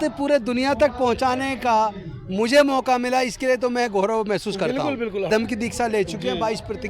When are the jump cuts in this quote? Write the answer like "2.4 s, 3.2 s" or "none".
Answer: 5.3 s